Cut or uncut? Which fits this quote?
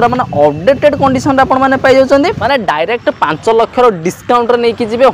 cut